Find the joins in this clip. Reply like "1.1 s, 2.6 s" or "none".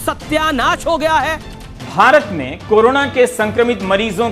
1.8 s

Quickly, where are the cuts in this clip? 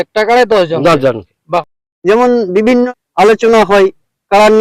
1.3 s, 2.9 s

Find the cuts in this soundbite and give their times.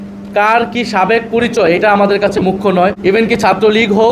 3.0 s

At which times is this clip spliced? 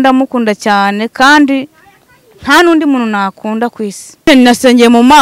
4.3 s

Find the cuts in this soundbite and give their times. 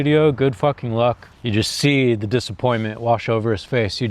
1.3 s

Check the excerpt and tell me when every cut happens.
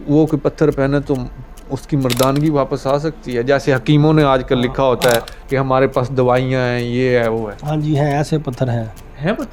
none

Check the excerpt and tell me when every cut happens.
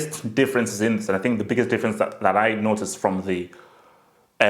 none

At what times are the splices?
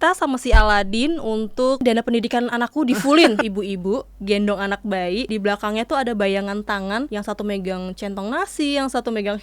1.8 s, 3.4 s, 5.3 s, 7.1 s

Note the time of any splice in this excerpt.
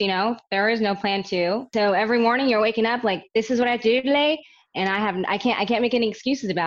1.7 s

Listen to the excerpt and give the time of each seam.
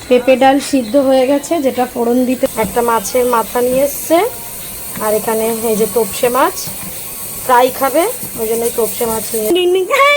2.5 s, 9.5 s

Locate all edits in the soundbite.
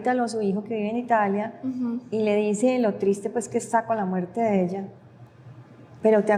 none

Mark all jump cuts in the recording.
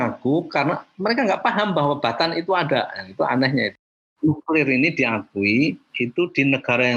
4.0 s

